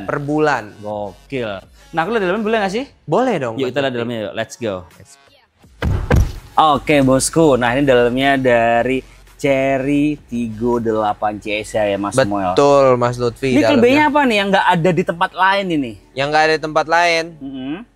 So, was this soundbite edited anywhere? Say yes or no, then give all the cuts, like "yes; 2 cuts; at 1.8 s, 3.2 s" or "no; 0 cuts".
no; 0 cuts